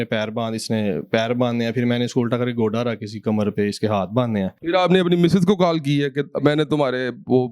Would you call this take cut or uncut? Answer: cut